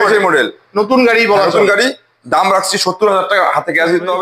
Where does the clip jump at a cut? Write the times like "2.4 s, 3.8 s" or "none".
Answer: none